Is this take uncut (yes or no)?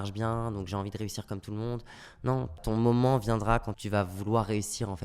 no